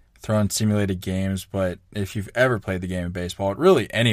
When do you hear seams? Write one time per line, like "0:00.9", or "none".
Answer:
none